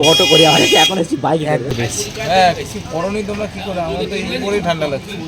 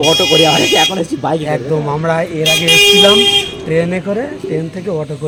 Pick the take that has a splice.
first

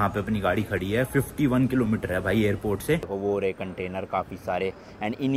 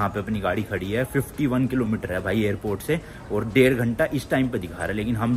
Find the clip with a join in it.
first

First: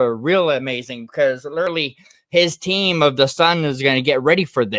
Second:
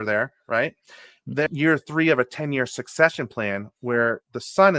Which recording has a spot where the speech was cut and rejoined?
second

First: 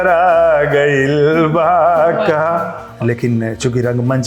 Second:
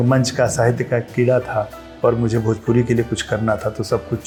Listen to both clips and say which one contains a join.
first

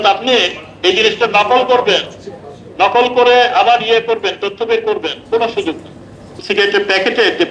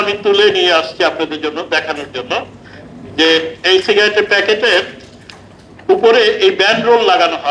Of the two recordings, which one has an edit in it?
first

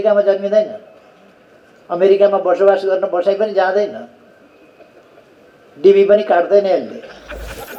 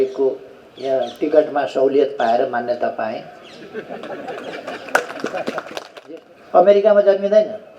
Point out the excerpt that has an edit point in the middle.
second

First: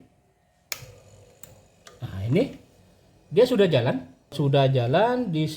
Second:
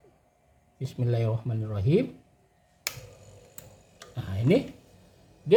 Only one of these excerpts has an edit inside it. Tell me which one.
first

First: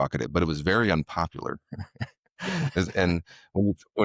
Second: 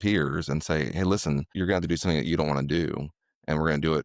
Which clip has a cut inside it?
second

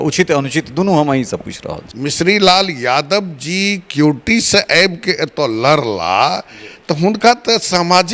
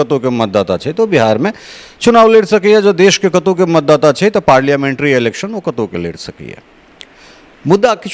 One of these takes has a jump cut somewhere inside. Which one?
first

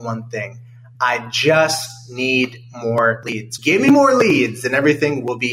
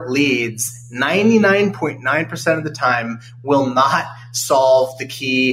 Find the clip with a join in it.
first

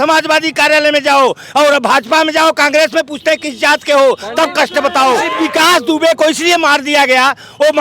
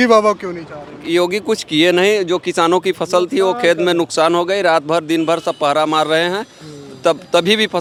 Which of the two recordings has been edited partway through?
first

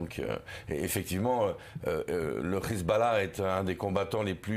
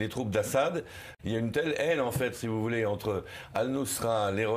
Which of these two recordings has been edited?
second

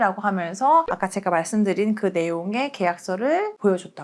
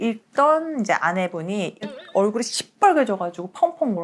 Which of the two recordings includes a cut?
second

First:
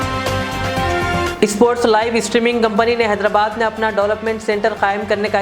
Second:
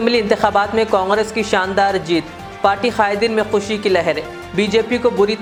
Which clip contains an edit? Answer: first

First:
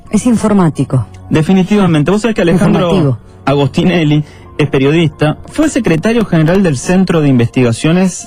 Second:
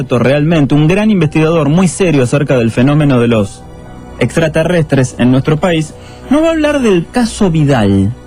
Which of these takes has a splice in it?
first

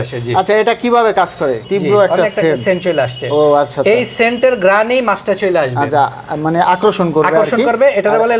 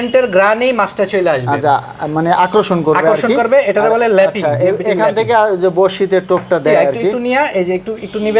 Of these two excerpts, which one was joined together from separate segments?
first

